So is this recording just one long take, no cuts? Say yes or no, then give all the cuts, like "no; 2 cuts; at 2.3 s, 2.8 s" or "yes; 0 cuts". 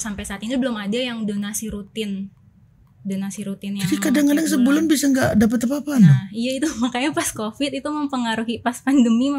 yes; 0 cuts